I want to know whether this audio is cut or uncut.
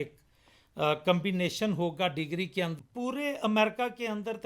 cut